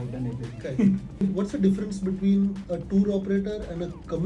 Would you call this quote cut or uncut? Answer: cut